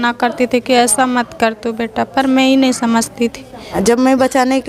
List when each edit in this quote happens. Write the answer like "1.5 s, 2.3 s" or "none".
3.8 s